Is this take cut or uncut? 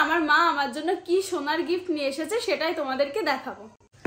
uncut